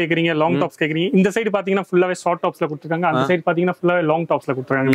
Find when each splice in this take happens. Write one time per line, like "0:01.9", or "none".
none

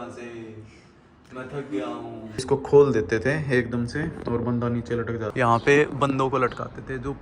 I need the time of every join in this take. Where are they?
0:02.4
0:05.3

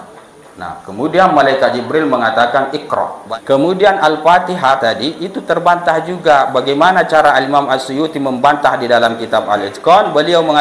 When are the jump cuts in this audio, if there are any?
0:03.2

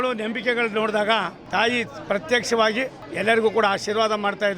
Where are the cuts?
0:01.4
0:03.0

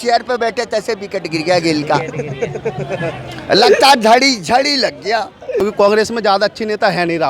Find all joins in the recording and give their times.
0:05.6

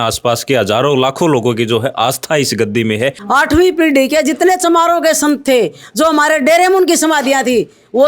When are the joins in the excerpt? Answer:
0:03.2

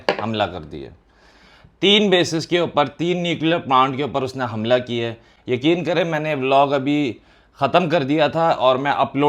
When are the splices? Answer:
none

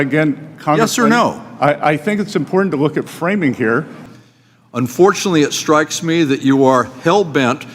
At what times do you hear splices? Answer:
0:03.9

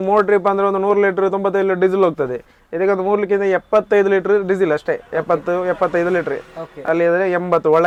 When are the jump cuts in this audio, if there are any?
none

